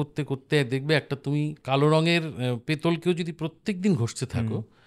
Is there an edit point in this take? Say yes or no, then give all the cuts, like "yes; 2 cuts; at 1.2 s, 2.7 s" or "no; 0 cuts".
yes; 1 cut; at 1.6 s